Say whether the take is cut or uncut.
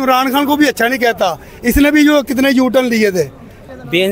uncut